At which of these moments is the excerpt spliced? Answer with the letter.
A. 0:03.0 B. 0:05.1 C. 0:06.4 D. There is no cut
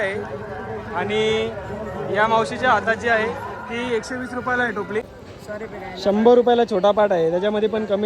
B